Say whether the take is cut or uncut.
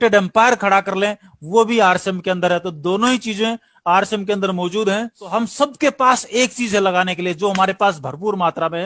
cut